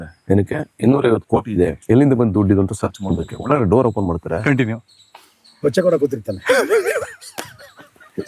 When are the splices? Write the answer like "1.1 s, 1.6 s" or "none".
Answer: 1.8 s